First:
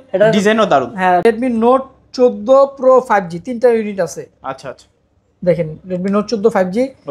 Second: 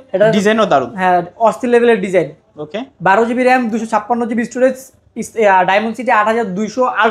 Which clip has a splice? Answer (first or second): first